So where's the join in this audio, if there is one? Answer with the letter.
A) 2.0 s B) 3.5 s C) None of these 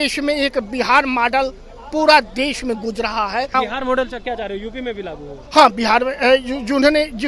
B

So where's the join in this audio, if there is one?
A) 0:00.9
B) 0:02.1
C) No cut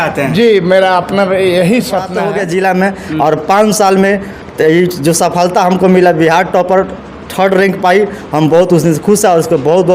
B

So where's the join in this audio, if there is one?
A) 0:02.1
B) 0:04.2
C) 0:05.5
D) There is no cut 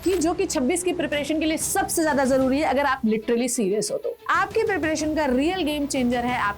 B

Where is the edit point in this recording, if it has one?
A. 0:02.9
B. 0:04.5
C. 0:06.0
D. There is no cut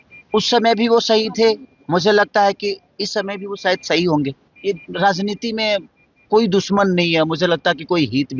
B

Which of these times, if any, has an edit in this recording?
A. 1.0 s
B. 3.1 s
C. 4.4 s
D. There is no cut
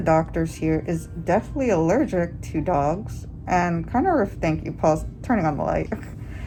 D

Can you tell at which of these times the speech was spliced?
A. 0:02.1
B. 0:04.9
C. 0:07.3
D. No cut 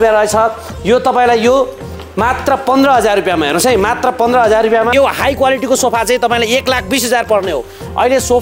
B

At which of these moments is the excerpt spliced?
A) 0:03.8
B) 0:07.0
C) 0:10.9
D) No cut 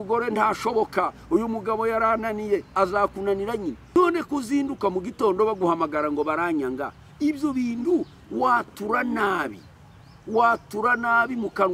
A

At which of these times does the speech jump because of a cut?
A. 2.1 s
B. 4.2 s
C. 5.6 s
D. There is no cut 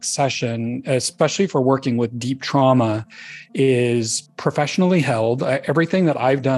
B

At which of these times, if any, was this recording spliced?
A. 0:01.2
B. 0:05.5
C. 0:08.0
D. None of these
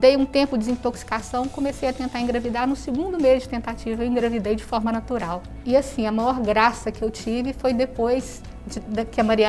B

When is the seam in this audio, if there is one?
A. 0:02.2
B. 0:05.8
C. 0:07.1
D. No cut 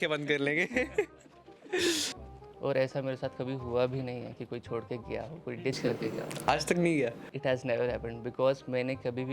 A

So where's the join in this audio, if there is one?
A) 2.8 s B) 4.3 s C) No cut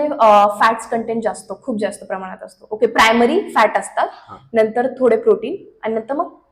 C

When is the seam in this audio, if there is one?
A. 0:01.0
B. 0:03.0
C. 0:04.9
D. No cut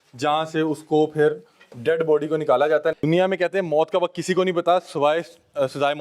B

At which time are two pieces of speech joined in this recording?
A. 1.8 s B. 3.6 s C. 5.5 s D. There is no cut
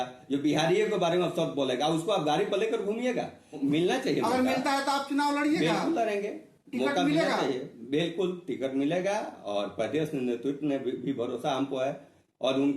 B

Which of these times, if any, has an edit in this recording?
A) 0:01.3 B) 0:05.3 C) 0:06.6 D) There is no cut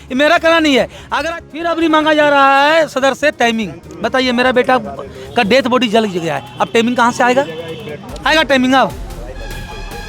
A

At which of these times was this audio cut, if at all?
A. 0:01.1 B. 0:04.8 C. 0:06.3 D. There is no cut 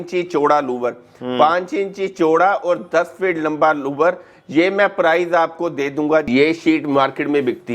C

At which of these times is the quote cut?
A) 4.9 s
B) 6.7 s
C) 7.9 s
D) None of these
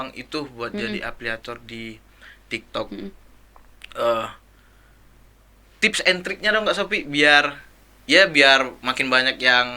D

